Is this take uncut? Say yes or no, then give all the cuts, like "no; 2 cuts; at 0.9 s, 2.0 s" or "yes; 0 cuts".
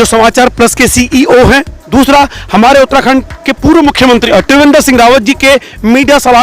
no; 2 cuts; at 1.8 s, 4.1 s